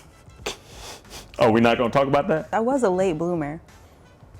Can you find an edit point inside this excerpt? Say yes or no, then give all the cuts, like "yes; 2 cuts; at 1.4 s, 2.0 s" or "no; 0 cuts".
yes; 1 cut; at 2.5 s